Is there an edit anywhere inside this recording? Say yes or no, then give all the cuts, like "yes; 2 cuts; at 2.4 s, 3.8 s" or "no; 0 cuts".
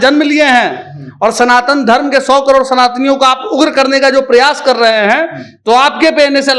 no; 0 cuts